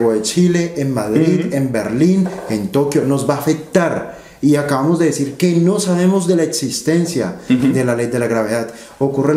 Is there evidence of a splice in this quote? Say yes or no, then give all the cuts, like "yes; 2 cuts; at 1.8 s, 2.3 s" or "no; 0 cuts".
no; 0 cuts